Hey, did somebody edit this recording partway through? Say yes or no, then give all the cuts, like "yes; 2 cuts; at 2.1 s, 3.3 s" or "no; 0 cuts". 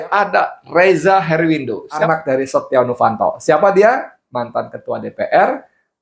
yes; 1 cut; at 2.0 s